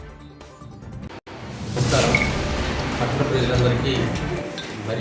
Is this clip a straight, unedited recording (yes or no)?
no